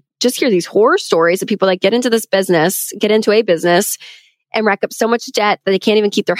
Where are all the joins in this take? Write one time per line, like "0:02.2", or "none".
none